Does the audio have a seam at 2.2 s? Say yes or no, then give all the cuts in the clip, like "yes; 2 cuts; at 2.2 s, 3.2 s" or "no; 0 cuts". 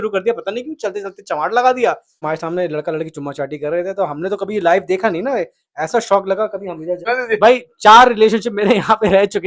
yes; 2 cuts; at 2.2 s, 7.1 s